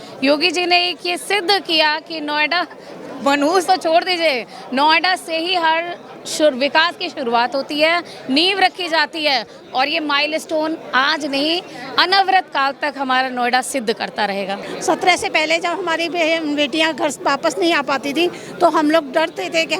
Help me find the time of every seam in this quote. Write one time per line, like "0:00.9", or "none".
0:14.7